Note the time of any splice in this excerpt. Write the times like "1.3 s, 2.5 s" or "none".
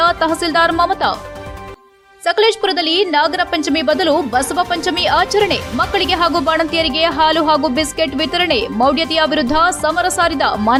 none